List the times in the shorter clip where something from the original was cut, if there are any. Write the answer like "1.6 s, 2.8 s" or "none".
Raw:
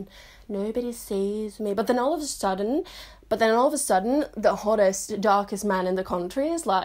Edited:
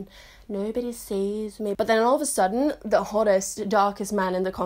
1.7 s